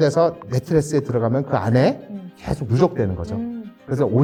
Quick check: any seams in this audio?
no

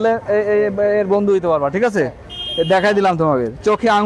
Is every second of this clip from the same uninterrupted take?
yes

